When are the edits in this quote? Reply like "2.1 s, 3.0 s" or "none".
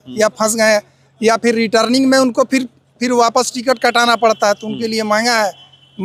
none